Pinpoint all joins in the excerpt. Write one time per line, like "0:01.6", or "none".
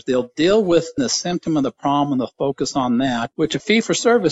0:01.0